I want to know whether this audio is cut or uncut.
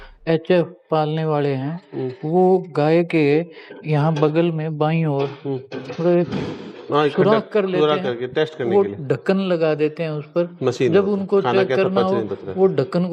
uncut